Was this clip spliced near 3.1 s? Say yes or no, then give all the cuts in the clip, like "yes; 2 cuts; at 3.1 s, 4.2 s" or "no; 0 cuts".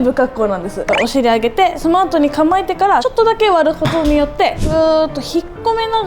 yes; 4 cuts; at 0.8 s, 1.8 s, 3.1 s, 4.6 s